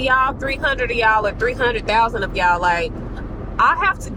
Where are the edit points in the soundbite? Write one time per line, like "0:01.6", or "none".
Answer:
none